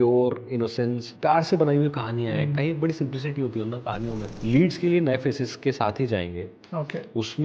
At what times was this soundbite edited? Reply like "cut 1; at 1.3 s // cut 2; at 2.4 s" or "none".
cut 1; at 1.1 s // cut 2; at 4.3 s